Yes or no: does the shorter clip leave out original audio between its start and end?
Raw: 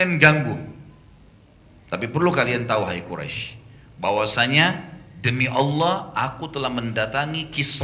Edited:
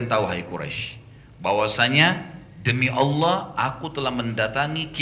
no